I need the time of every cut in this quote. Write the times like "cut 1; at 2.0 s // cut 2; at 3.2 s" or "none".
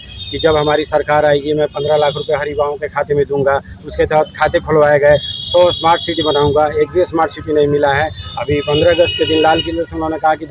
none